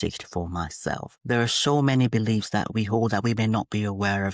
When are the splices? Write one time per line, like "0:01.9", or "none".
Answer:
0:01.1